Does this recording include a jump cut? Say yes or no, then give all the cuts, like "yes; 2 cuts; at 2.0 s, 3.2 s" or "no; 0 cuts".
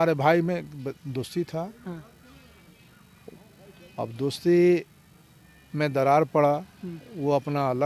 no; 0 cuts